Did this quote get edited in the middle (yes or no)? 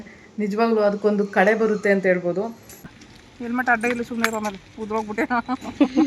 yes